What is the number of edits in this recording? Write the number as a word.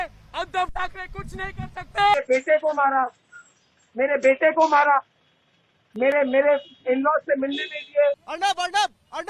two